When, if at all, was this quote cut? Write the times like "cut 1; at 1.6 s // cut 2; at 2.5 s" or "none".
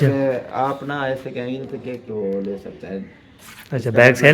cut 1; at 2.0 s